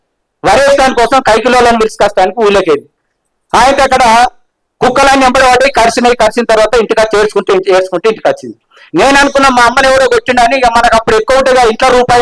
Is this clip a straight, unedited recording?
yes; 0 cuts

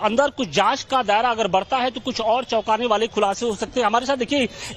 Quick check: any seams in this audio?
yes; 1 cut; at 3.0 s

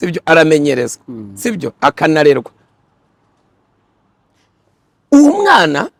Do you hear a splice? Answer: no; 0 cuts

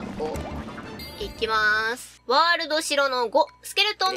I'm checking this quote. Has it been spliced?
yes; 2 cuts; at 1.0 s, 2.1 s

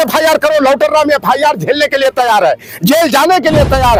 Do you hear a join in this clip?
no; 0 cuts

